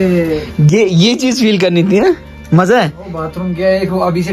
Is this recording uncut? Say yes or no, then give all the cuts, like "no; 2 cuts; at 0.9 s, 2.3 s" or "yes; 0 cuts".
yes; 0 cuts